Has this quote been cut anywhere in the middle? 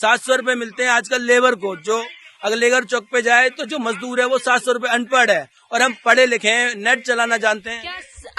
no; 0 cuts

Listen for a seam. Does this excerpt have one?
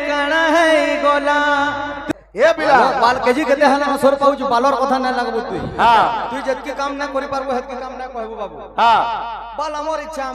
yes; 1 cut; at 2.0 s

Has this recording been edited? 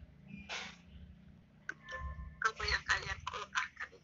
yes; 1 cut; at 1.4 s

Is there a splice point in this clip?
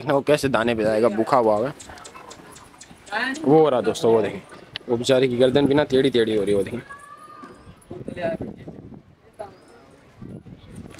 no; 0 cuts

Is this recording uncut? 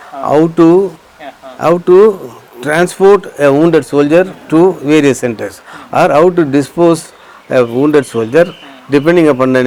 yes; 0 cuts

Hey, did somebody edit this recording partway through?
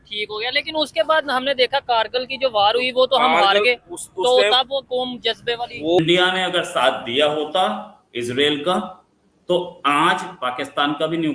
yes; 1 cut; at 6.0 s

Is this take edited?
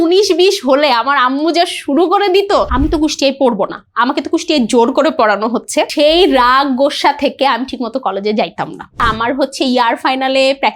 yes; 3 cuts; at 2.7 s, 5.9 s, 9.0 s

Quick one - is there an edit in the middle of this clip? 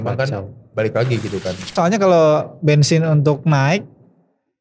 yes; 1 cut; at 1.7 s

